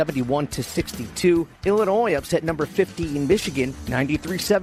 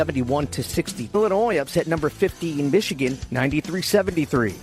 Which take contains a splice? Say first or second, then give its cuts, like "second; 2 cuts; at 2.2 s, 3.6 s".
second; 1 cut; at 1.1 s